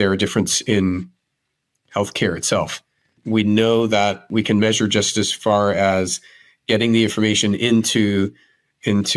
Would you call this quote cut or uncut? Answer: cut